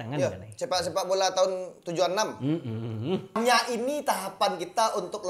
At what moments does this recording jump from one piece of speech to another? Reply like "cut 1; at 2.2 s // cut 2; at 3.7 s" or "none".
cut 1; at 3.4 s